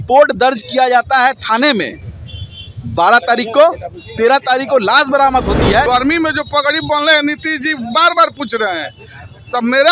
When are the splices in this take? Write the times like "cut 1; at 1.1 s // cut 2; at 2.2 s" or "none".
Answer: cut 1; at 5.8 s